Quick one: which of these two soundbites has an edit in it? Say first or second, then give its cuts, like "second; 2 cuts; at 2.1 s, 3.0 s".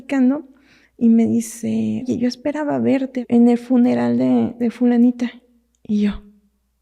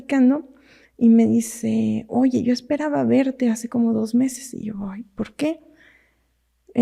first; 2 cuts; at 2.1 s, 3.2 s